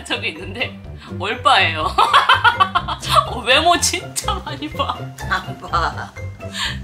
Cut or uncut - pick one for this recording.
uncut